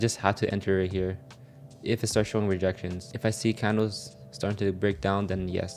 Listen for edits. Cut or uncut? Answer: uncut